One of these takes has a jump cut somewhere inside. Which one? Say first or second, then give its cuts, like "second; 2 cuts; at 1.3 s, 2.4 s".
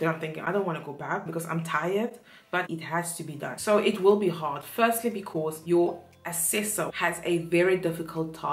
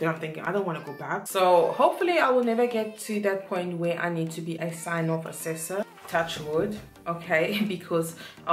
second; 1 cut; at 1.2 s